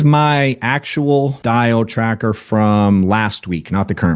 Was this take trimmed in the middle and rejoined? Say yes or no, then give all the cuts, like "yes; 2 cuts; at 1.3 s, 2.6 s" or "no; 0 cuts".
yes; 1 cut; at 1.4 s